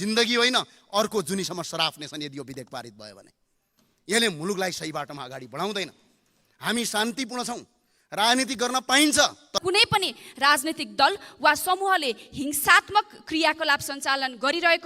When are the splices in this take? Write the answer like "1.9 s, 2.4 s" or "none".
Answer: 9.6 s